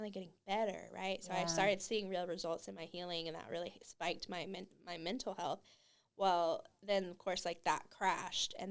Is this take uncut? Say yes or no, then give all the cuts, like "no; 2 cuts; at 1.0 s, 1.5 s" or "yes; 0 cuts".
yes; 0 cuts